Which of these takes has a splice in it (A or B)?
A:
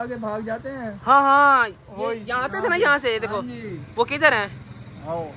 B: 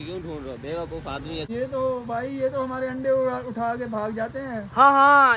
B